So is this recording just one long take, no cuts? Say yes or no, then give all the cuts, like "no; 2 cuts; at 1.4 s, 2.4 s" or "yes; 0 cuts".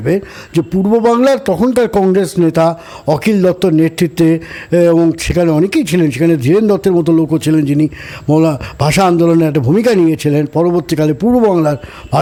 yes; 0 cuts